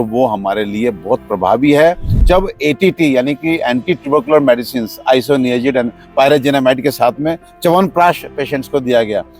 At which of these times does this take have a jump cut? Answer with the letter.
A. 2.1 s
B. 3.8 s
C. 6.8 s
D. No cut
A